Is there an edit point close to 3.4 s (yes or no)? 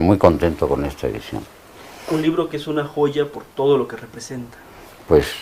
no